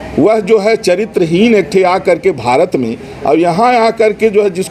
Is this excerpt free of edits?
yes; 0 cuts

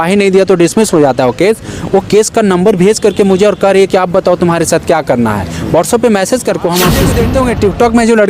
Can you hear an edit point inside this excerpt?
yes; 1 cut; at 7.1 s

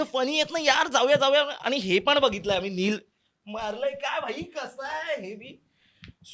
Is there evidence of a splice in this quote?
no; 0 cuts

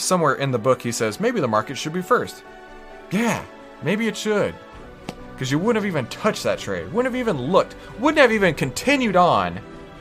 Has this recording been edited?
no; 0 cuts

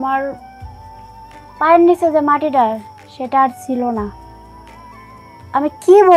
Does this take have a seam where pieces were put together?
no; 0 cuts

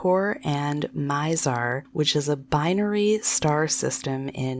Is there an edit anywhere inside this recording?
no; 0 cuts

